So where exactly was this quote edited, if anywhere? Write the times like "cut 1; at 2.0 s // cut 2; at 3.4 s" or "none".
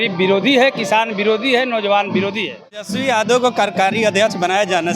cut 1; at 2.8 s